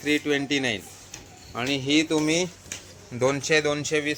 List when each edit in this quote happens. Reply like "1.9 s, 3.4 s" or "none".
none